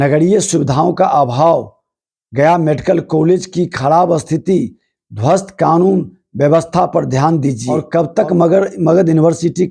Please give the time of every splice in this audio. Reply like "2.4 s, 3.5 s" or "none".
7.7 s